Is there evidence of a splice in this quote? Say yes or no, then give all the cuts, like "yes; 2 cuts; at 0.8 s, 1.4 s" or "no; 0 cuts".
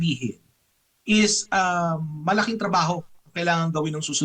no; 0 cuts